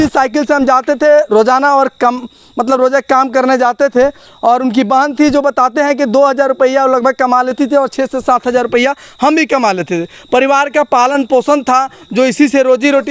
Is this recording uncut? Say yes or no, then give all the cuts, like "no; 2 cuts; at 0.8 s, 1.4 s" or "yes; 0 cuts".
yes; 0 cuts